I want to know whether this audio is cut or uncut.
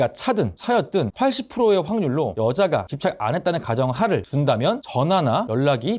cut